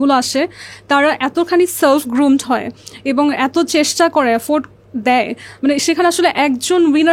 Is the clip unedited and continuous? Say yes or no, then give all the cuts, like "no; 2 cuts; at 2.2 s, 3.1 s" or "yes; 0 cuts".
yes; 0 cuts